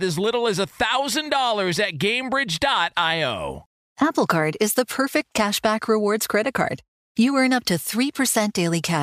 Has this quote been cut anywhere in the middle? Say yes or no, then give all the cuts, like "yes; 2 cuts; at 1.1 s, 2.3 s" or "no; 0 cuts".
yes; 1 cut; at 3.7 s